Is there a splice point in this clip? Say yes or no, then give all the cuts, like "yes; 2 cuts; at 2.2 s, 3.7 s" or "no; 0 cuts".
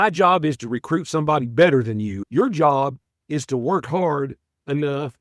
yes; 1 cut; at 2.2 s